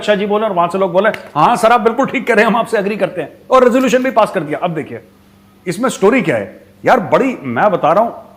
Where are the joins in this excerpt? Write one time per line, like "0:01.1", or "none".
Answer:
none